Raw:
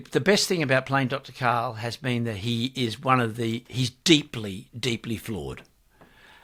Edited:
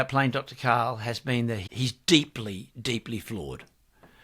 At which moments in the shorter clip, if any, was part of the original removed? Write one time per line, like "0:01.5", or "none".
0:01.6